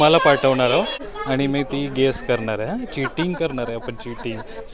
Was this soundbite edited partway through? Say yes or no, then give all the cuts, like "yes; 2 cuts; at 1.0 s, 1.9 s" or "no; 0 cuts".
yes; 1 cut; at 1.0 s